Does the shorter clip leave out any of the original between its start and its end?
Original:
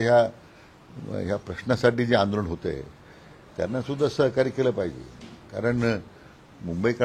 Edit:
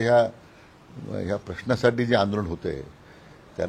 no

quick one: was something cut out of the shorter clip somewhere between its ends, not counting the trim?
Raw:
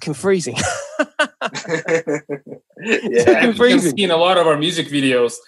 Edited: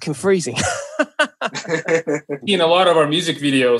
yes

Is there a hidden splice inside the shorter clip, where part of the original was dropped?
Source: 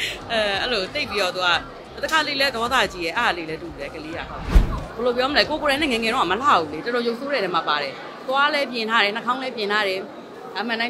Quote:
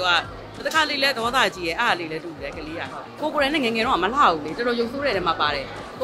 yes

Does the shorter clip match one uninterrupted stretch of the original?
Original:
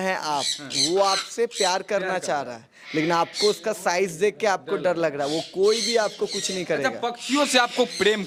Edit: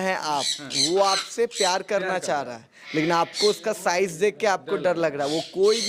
yes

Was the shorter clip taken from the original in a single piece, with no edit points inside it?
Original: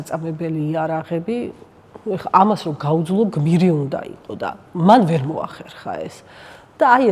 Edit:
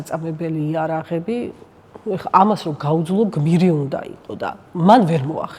yes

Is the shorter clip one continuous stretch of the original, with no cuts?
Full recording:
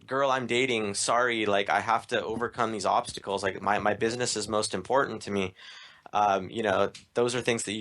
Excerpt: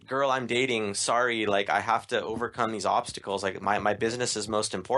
yes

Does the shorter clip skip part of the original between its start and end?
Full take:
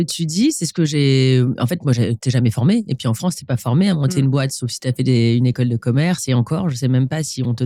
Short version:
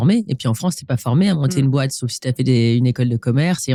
no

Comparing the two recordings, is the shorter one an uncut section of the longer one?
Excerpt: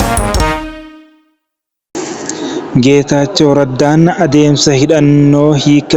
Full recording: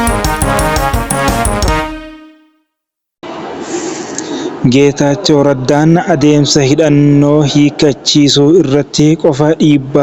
no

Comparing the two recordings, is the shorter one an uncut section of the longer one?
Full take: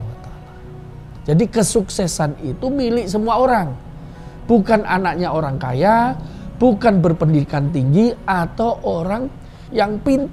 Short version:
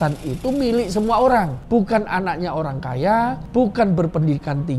no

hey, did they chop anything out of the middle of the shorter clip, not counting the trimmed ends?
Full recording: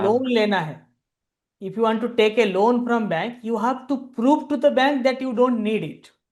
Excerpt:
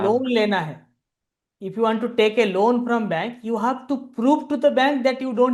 no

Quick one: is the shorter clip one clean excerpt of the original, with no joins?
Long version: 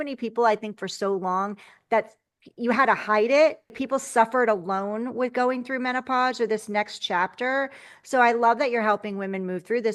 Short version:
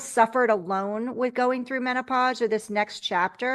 yes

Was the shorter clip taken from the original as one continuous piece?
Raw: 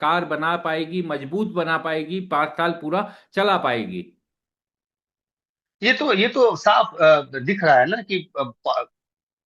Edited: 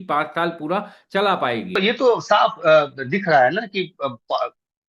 no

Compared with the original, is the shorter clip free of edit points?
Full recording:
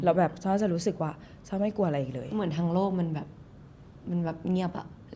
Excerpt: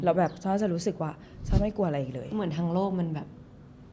yes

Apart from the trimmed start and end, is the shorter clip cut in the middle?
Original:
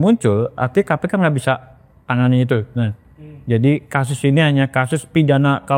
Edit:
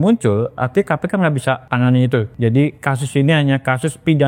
yes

